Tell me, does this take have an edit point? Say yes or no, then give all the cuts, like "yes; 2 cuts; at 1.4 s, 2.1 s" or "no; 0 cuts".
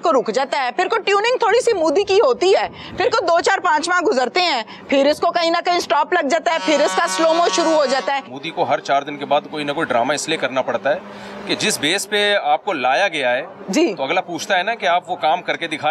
yes; 1 cut; at 8.4 s